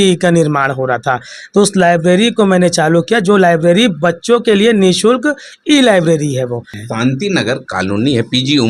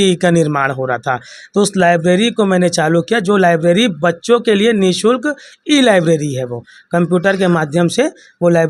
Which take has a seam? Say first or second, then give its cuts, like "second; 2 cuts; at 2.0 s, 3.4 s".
first; 1 cut; at 6.7 s